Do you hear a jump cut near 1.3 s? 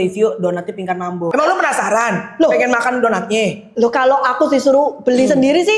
yes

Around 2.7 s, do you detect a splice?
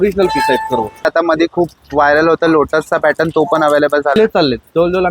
no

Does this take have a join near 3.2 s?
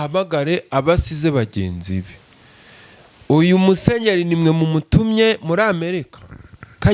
no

